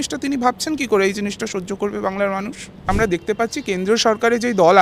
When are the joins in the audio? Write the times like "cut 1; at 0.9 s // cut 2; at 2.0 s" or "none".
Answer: cut 1; at 2.8 s